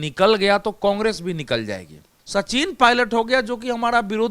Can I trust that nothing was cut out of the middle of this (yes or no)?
no